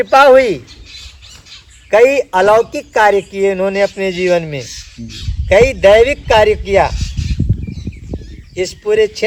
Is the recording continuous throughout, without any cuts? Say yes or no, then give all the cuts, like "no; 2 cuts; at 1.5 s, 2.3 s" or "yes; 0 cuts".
yes; 0 cuts